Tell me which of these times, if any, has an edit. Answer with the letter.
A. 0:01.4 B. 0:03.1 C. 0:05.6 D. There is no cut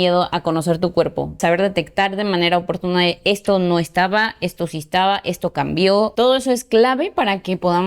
A